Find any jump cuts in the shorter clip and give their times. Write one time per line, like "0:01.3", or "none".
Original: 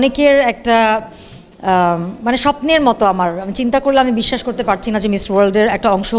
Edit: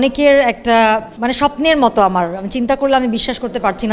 0:01.1